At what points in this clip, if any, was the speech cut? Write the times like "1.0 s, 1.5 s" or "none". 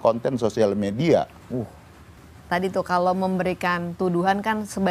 2.2 s